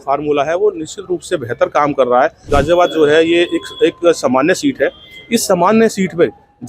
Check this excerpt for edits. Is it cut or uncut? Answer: cut